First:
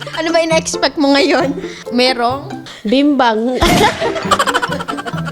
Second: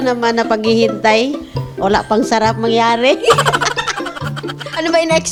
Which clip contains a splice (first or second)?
first